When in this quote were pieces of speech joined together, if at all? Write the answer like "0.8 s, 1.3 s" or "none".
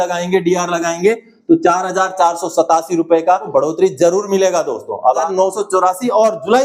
3.5 s, 5.2 s